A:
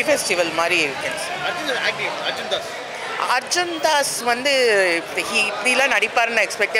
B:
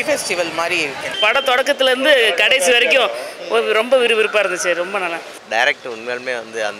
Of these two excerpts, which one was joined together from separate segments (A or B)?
B